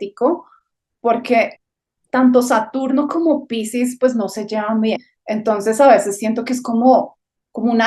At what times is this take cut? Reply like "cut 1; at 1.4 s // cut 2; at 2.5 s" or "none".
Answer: cut 1; at 1.6 s // cut 2; at 5.1 s